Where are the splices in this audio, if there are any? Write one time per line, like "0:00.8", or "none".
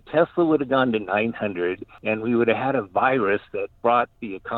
0:01.9
0:03.7